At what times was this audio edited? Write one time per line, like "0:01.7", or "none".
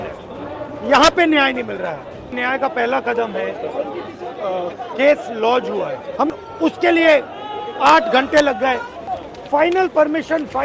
0:02.4
0:06.3
0:08.9